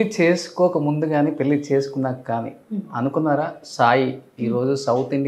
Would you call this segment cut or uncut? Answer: uncut